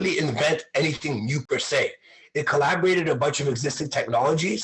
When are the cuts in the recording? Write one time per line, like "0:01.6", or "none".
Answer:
0:01.4